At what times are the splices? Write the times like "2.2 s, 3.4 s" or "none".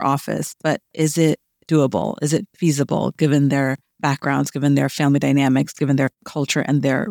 3.9 s, 6.2 s